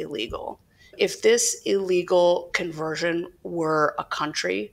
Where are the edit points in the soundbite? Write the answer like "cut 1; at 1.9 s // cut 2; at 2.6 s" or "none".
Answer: cut 1; at 0.9 s